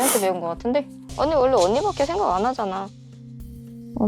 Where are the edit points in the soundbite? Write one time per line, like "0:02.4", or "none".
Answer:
0:01.0